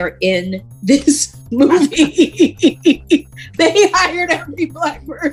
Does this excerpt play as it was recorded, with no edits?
yes; 0 cuts

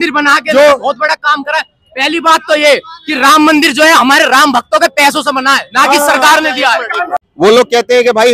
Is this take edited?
no; 0 cuts

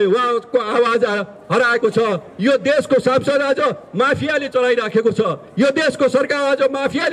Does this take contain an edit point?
no; 0 cuts

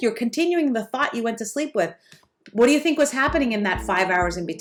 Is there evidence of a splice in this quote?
no; 0 cuts

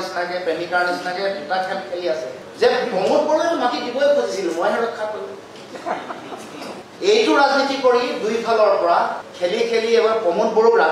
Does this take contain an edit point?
yes; 2 cuts; at 6.9 s, 9.2 s

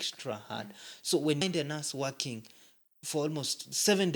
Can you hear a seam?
yes; 1 cut; at 1.4 s

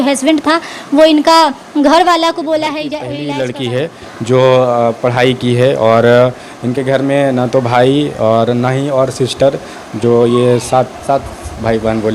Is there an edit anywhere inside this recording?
yes; 1 cut; at 2.9 s

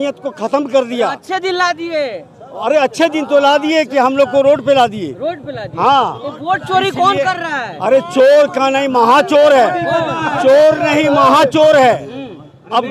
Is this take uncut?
yes; 0 cuts

